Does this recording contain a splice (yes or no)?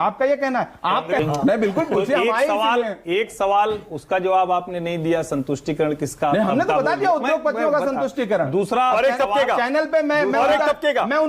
yes